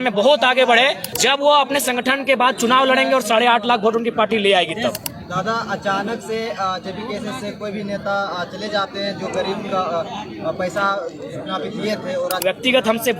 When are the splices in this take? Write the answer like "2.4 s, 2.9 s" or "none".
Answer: 1.0 s, 5.1 s, 12.4 s

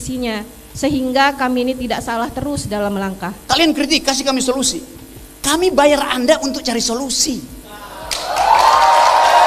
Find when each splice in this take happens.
3.3 s

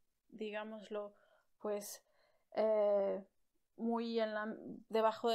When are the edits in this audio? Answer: none

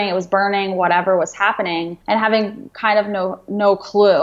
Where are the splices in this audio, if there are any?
1.9 s

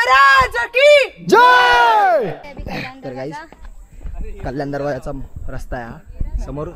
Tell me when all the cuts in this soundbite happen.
2.4 s

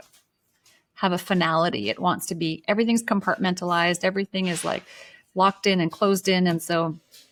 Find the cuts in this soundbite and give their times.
none

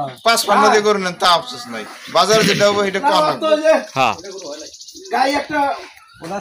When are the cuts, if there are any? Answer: none

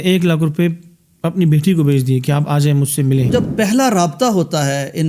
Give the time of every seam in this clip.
3.3 s

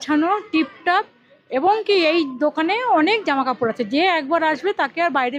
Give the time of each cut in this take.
none

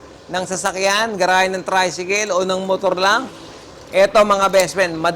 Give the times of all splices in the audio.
none

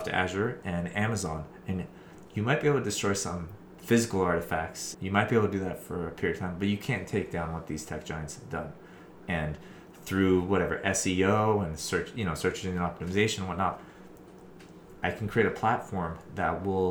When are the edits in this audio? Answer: none

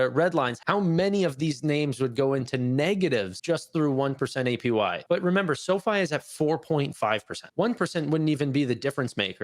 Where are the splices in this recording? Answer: 5.0 s, 7.4 s

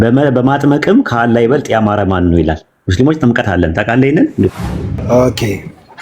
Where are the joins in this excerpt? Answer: 4.6 s

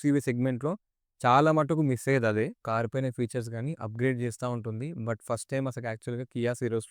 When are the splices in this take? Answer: 2.6 s

